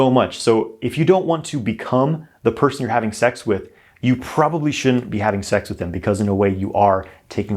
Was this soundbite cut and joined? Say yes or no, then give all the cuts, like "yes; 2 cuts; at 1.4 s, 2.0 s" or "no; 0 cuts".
no; 0 cuts